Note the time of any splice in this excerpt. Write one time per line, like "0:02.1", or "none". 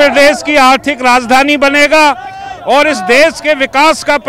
none